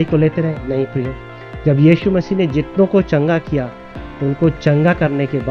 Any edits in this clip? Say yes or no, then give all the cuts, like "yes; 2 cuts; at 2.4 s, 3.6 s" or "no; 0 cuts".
no; 0 cuts